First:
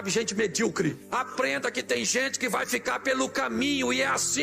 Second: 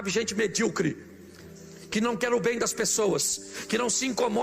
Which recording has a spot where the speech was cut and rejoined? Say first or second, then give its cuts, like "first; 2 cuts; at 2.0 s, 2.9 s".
first; 1 cut; at 1.0 s